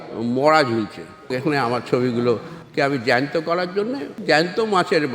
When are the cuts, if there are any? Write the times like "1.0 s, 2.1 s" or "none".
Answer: 1.3 s, 4.2 s